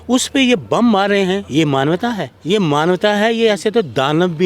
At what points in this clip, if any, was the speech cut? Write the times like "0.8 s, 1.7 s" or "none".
2.3 s